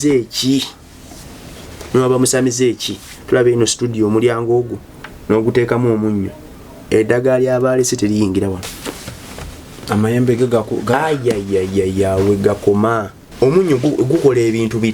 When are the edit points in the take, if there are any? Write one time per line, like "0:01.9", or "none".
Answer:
0:13.2